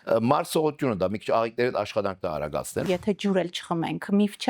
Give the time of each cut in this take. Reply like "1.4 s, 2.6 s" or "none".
2.9 s